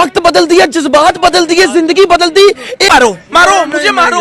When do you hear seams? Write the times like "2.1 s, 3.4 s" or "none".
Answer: 2.9 s